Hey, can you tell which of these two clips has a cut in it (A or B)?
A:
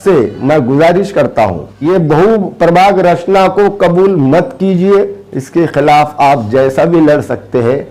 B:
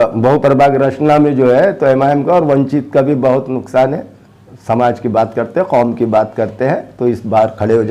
A